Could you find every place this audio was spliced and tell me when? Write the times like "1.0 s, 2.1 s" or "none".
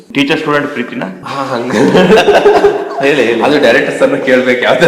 1.2 s

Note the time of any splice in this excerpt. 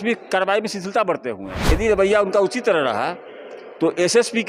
1.6 s

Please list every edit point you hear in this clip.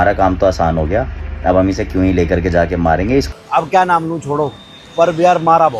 3.3 s

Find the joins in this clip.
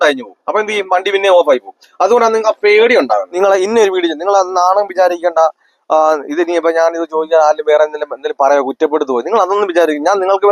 3.3 s

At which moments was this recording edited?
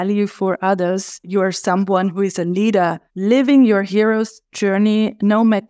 1.3 s, 3.1 s

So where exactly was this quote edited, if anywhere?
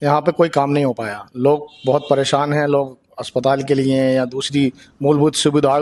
none

